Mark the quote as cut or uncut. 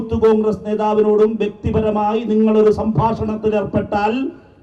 uncut